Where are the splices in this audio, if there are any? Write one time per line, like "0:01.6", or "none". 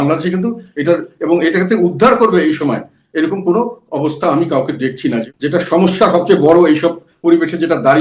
0:05.3